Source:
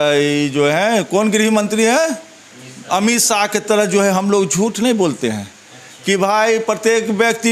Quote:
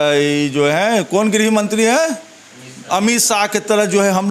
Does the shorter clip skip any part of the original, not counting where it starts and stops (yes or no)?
no